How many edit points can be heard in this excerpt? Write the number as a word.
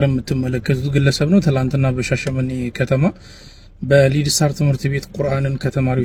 zero